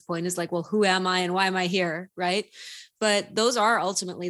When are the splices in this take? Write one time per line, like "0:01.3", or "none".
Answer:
none